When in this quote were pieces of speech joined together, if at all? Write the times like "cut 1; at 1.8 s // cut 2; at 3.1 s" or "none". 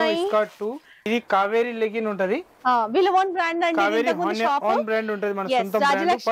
cut 1; at 1.0 s